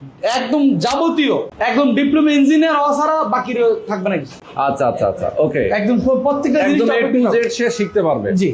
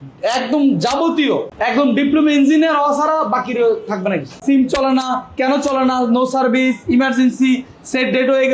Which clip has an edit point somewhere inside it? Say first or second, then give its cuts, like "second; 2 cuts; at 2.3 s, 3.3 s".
second; 1 cut; at 4.3 s